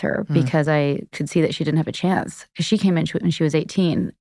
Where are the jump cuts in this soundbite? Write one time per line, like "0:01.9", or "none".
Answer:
0:01.2